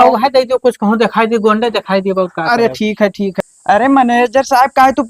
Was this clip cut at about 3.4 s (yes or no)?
yes